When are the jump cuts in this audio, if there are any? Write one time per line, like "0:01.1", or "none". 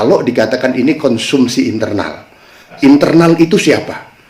0:02.7